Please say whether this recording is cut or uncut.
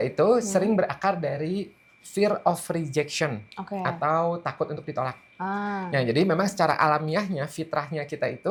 uncut